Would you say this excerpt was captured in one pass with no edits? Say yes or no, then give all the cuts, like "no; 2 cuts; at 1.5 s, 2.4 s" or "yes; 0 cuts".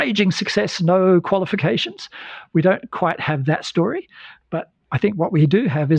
yes; 0 cuts